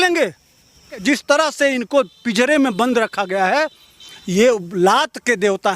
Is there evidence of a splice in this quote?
yes; 1 cut; at 1.0 s

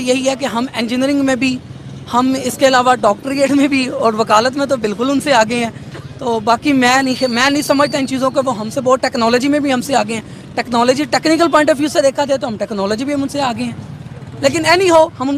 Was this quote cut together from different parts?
no; 0 cuts

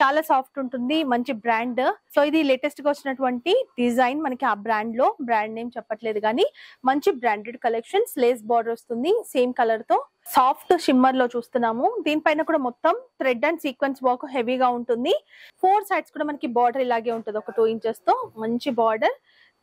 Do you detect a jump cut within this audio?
yes; 3 cuts; at 2.0 s, 10.2 s, 15.4 s

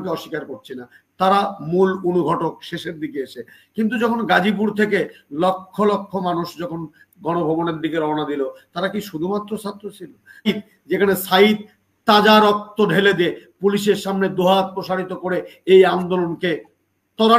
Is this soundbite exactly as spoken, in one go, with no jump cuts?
no; 1 cut; at 10.5 s

